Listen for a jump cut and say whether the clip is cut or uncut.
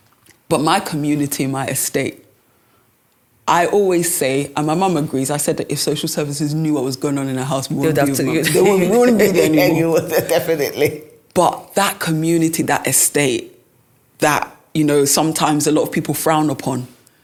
uncut